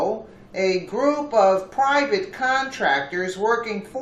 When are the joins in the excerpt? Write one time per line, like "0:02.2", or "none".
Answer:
none